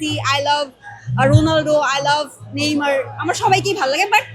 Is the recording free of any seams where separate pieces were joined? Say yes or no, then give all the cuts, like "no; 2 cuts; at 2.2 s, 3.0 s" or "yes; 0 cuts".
yes; 0 cuts